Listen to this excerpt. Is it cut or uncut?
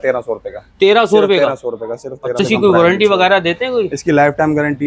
cut